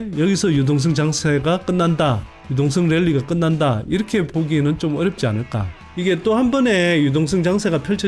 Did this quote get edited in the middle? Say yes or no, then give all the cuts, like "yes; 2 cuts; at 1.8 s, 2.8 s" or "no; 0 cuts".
yes; 1 cut; at 5.8 s